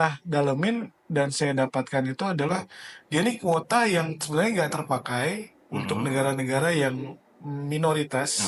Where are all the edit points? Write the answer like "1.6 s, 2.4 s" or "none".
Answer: none